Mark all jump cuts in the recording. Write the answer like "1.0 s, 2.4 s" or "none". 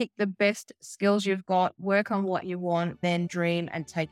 3.1 s